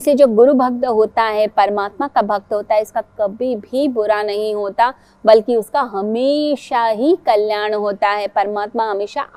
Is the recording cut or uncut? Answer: uncut